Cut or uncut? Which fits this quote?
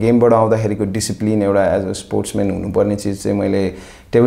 uncut